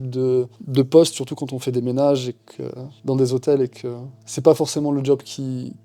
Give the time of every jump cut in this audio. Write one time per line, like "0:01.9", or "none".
none